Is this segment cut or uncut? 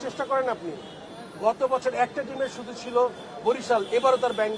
uncut